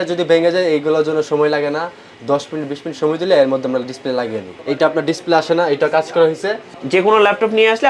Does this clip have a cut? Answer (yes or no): yes